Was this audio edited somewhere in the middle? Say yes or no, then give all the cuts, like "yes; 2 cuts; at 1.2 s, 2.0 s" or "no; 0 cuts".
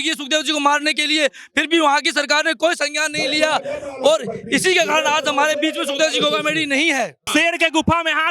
yes; 1 cut; at 7.2 s